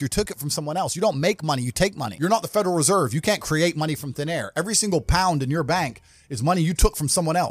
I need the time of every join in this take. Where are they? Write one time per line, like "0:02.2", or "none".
0:02.1